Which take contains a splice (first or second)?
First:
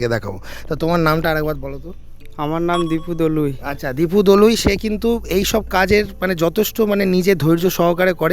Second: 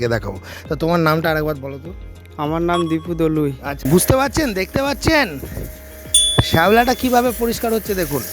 second